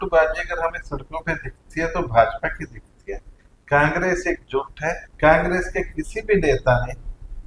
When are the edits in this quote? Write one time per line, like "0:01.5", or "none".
0:05.1